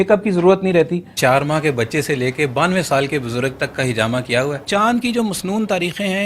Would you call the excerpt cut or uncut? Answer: cut